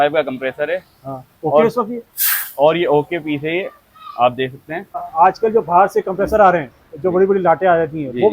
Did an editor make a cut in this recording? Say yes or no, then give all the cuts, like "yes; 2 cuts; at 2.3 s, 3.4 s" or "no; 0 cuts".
yes; 1 cut; at 5.1 s